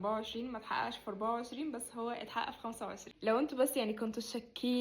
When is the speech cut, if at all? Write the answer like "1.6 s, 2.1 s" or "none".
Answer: 3.1 s

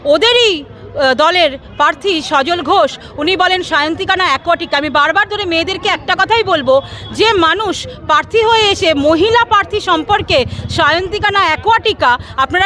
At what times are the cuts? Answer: none

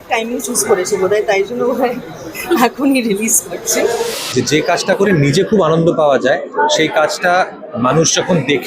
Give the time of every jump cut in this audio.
4.1 s

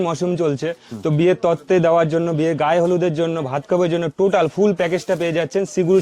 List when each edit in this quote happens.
none

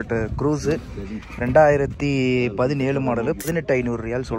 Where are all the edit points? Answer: 3.5 s

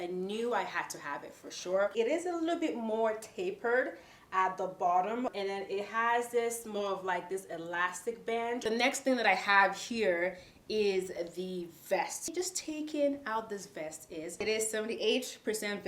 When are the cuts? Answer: 1.9 s, 8.6 s, 14.4 s

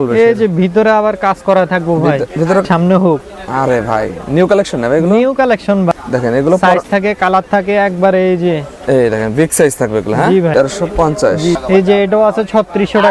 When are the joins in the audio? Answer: 2.6 s, 5.9 s, 10.5 s, 11.6 s

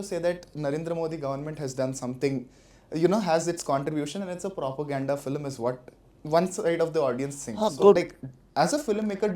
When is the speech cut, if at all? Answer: 8.0 s

